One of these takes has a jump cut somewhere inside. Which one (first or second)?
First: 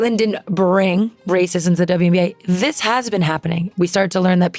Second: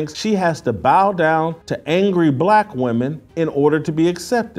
first